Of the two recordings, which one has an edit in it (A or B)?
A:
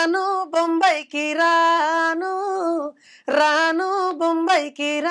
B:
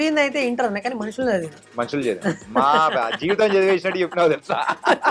B